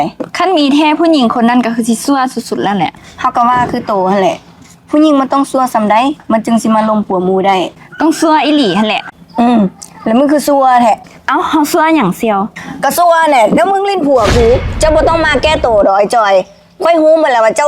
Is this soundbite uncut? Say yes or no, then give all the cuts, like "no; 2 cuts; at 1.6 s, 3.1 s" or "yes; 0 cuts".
no; 2 cuts; at 9.2 s, 14.7 s